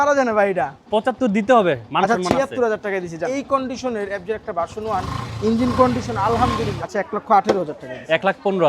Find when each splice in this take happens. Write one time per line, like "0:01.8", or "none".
0:03.4
0:06.8